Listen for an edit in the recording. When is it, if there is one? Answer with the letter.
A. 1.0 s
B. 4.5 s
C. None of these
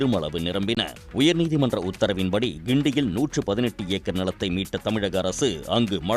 A